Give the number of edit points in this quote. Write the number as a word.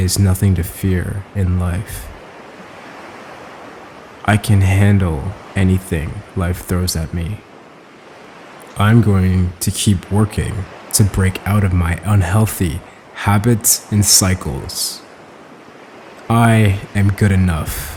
zero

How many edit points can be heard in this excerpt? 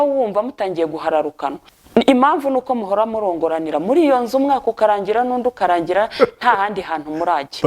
one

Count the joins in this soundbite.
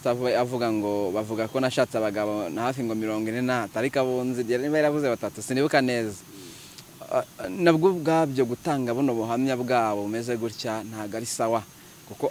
zero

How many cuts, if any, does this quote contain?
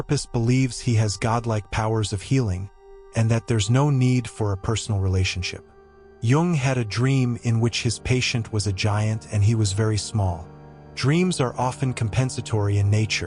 one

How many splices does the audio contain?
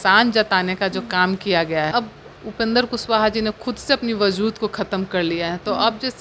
one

